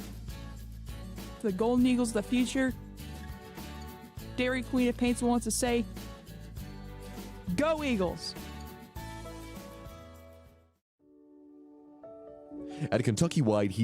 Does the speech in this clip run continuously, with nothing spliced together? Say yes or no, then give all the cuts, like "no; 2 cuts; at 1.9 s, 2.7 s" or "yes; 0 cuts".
no; 1 cut; at 11.1 s